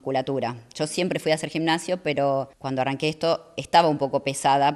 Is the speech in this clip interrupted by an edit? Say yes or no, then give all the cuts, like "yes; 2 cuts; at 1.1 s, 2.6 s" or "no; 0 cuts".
yes; 1 cut; at 2.6 s